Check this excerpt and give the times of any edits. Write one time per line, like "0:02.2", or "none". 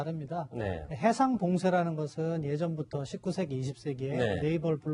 0:03.6